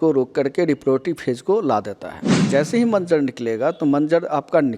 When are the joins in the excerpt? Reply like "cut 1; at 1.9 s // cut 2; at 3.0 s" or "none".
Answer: cut 1; at 2.4 s

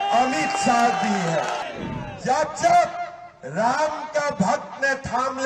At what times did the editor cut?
cut 1; at 1.7 s

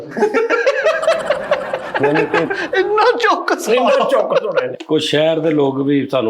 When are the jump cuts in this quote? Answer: cut 1; at 4.7 s

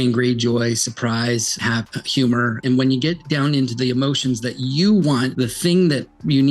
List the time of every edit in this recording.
cut 1; at 1.6 s // cut 2; at 2.6 s // cut 3; at 5.3 s

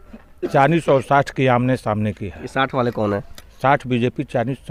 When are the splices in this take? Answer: none

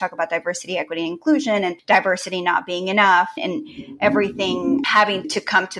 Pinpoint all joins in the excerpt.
cut 1; at 1.8 s

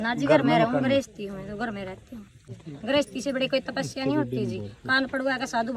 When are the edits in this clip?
cut 1; at 2.4 s

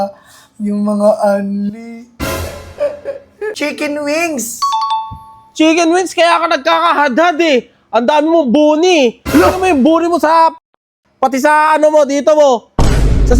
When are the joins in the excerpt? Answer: cut 1; at 3.5 s

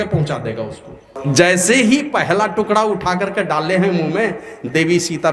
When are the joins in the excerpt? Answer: cut 1; at 1.2 s

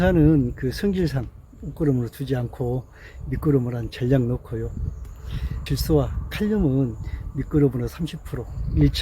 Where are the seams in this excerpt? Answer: cut 1; at 5.5 s

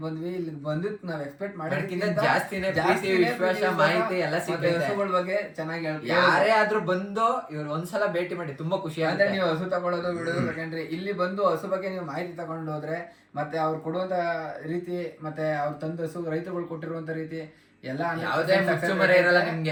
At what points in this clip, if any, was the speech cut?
none

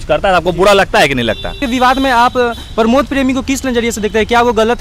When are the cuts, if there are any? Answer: cut 1; at 1.6 s

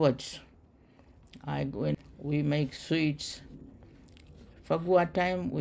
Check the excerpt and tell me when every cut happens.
cut 1; at 1.9 s

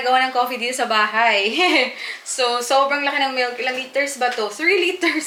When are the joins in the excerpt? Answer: none

